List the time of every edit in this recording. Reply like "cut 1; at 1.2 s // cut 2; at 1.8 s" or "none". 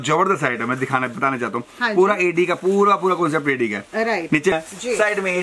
cut 1; at 4.5 s